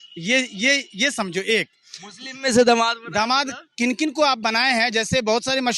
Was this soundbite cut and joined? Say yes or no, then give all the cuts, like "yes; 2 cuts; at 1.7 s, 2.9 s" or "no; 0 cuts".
no; 0 cuts